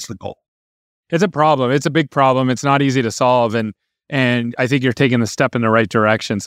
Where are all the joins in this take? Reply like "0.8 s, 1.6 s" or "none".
0.9 s